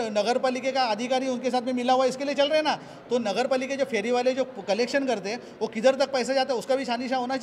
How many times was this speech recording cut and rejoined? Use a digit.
0